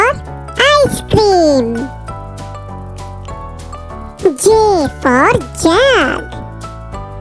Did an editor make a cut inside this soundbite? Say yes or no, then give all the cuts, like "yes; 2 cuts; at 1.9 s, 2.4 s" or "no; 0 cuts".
yes; 1 cut; at 6.2 s